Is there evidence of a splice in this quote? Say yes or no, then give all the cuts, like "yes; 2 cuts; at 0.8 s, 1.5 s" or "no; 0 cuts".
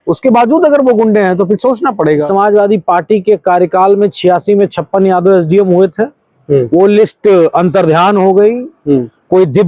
yes; 1 cut; at 2.2 s